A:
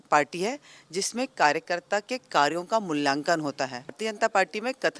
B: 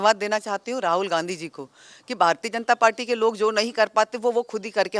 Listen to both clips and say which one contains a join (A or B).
A